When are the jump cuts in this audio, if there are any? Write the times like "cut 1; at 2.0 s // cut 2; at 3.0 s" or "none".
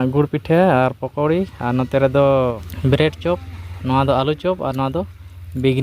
cut 1; at 2.7 s